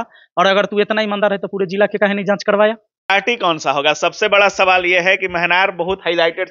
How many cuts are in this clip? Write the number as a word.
one